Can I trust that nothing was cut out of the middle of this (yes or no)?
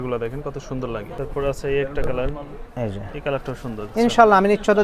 no